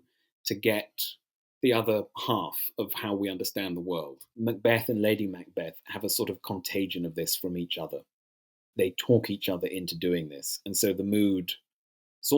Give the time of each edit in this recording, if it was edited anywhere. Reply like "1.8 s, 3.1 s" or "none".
4.2 s, 8.8 s